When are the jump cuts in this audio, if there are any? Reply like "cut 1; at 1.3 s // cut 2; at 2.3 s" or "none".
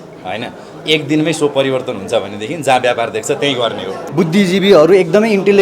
cut 1; at 4.0 s